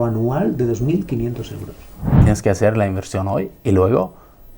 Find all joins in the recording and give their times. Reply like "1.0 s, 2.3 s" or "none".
2.2 s

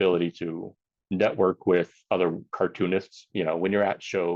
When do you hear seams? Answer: 3.2 s

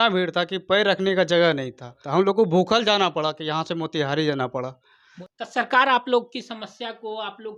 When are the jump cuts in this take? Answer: 2.0 s, 5.1 s

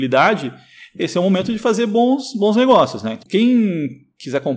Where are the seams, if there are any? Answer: 3.2 s

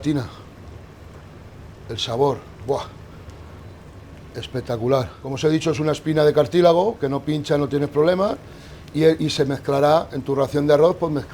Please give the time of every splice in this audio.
5.2 s

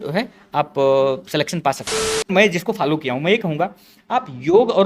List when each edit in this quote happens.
2.3 s

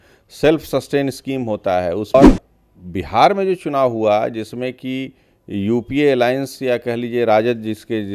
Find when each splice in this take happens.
2.1 s

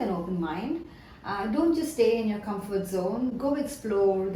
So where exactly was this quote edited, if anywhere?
none

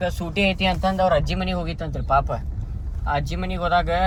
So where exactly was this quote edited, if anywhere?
none

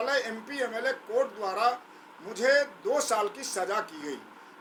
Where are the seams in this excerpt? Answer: none

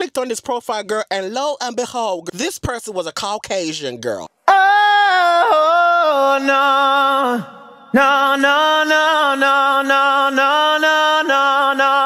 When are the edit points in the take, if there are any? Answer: none

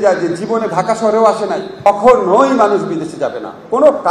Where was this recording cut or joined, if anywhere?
1.9 s

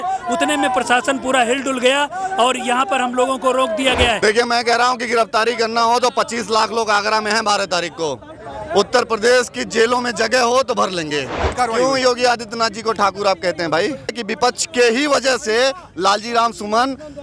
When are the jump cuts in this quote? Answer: 4.2 s, 11.5 s, 14.1 s

